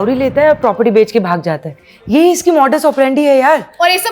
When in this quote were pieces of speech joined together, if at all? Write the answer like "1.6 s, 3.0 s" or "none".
none